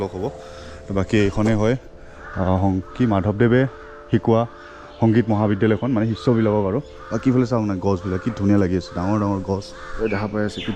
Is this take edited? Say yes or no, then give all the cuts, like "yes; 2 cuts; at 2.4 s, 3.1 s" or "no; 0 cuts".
yes; 1 cut; at 9.8 s